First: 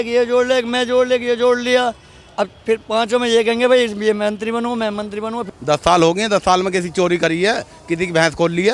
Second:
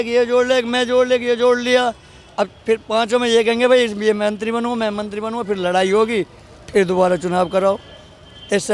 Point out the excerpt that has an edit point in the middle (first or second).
first